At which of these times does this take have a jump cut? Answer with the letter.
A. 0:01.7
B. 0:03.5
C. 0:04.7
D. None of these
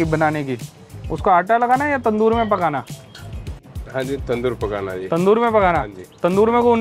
D